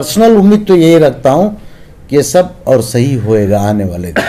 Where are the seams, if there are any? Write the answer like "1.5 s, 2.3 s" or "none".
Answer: none

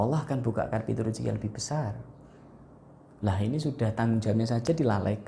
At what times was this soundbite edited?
none

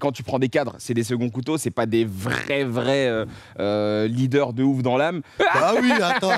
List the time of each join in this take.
5.4 s

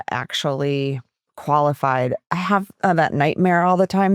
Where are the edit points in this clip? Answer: 2.2 s

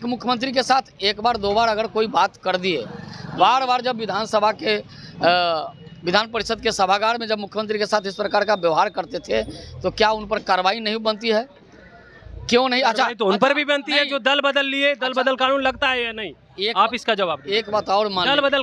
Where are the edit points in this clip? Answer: none

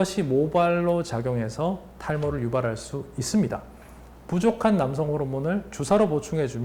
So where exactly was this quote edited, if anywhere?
none

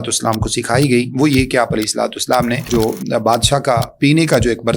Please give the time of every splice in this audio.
2.7 s

